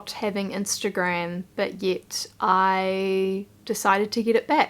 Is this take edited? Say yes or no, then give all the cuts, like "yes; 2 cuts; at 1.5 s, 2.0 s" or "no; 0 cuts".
no; 0 cuts